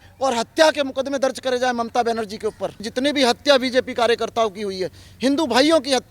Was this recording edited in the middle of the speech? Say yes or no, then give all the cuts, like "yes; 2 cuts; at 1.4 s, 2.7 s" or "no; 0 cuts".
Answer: yes; 1 cut; at 2.9 s